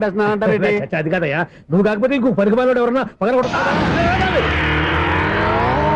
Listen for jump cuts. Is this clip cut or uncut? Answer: uncut